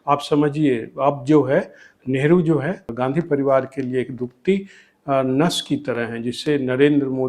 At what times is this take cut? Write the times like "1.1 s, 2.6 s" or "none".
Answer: 2.8 s